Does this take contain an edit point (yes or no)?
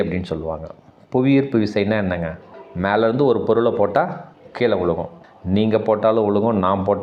no